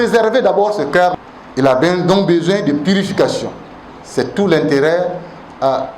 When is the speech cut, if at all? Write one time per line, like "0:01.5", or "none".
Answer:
0:01.1